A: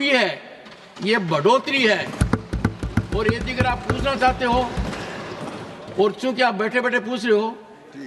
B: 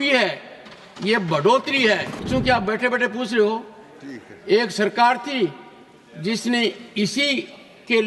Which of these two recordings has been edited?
B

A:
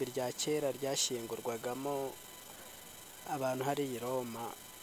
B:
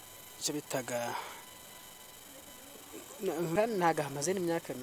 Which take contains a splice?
B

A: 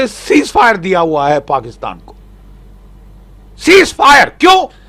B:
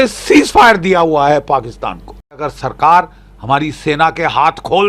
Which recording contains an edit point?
B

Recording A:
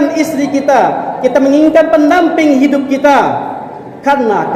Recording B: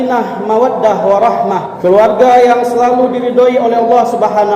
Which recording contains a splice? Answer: B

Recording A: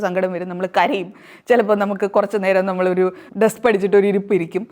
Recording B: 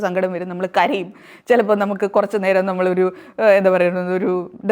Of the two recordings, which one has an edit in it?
A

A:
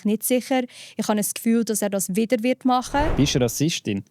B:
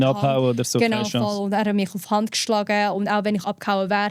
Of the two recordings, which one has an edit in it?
A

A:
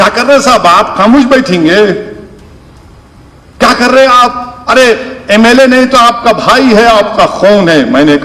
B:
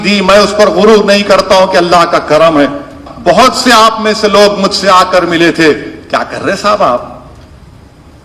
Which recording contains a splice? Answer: B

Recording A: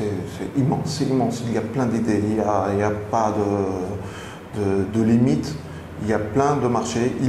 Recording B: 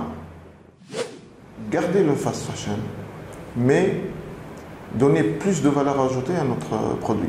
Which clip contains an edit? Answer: B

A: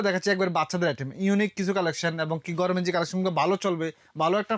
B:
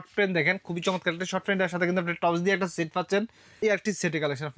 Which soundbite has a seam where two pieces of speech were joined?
B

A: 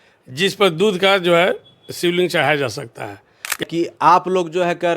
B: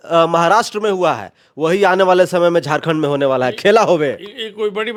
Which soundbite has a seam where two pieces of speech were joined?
A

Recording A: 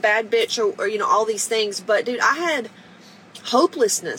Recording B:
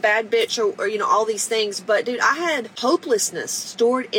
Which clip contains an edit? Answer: B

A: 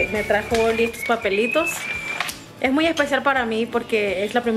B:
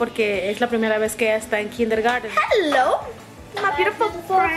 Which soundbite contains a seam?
B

